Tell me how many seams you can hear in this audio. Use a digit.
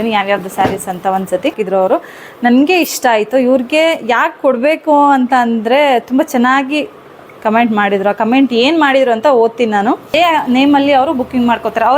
2